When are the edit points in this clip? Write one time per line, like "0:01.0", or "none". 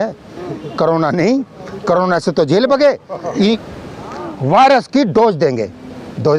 0:03.6